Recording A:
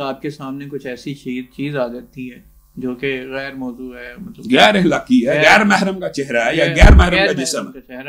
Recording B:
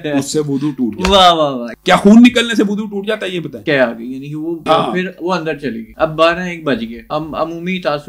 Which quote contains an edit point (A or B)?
B